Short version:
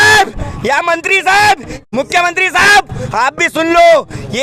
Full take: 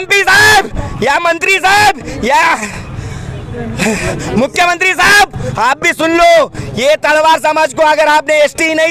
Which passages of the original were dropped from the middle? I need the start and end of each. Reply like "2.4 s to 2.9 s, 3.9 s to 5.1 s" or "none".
2.2 s to 4.2 s